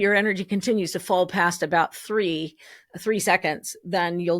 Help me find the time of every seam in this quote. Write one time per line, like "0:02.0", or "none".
none